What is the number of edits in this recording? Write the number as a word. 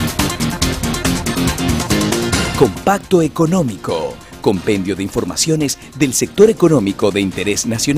one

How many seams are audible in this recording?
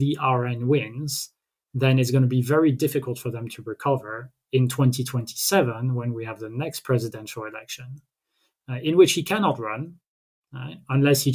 zero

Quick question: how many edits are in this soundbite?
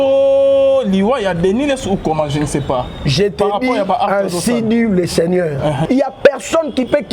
one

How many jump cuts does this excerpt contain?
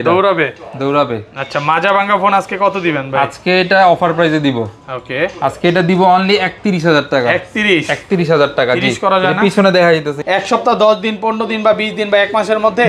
one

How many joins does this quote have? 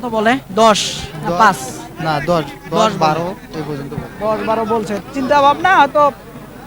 zero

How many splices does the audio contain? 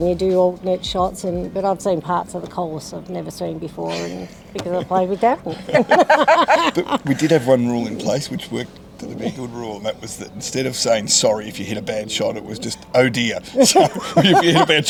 zero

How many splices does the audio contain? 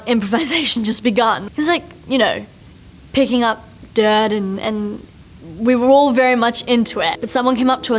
one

